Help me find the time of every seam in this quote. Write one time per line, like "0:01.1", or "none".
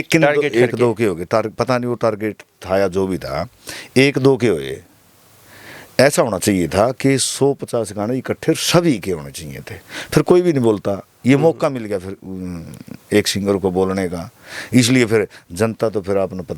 none

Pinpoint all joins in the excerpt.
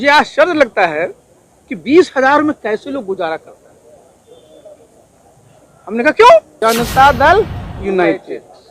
0:06.5

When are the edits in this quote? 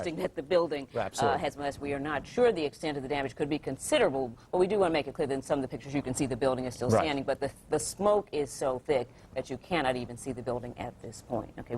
0:10.3

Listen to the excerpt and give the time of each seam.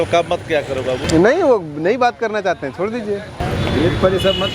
0:01.0
0:03.4

